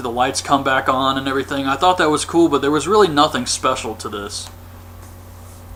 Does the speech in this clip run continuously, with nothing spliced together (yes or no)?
yes